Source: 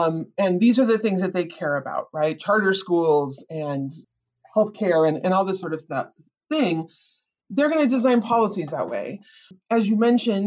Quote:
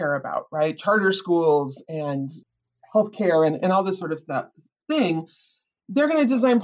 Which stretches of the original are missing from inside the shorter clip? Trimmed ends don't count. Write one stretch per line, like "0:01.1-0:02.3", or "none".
none